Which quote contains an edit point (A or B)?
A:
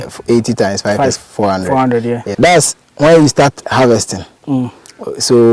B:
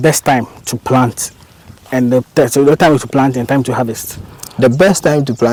A